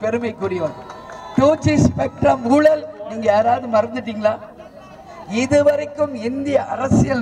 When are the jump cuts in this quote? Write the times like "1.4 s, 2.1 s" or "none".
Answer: none